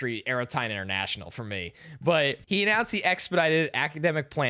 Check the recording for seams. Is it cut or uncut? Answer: cut